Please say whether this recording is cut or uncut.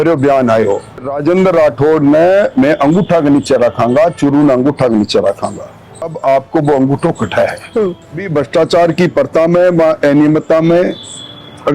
cut